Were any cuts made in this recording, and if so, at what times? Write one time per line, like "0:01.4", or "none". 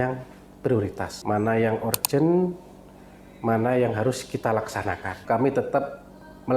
0:01.1
0:05.2